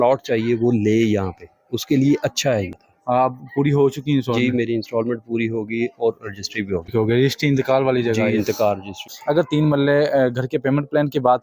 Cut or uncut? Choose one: cut